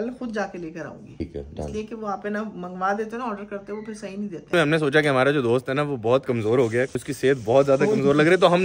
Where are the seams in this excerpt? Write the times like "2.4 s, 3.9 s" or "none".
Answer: 1.2 s, 4.5 s, 7.0 s